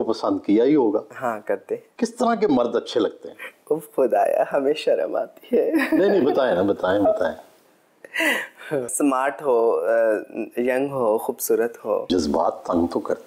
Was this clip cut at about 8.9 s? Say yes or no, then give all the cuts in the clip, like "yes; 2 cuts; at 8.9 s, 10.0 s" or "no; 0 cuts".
yes; 3 cuts; at 1.8 s, 8.9 s, 12.1 s